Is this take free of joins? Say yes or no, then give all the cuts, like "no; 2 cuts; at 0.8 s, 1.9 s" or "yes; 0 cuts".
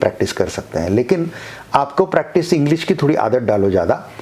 yes; 0 cuts